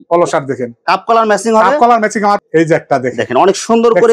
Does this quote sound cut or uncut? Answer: cut